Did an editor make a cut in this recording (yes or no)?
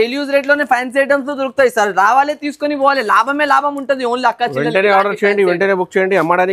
no